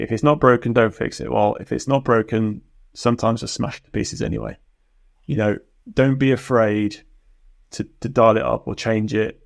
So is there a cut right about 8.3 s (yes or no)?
no